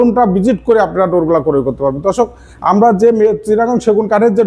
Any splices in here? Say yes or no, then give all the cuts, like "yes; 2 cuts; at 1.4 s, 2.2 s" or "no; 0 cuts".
no; 0 cuts